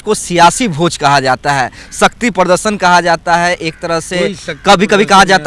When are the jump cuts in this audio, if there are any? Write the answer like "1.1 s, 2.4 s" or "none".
none